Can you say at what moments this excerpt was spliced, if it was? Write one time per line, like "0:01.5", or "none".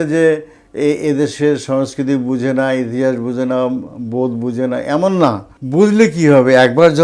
0:05.5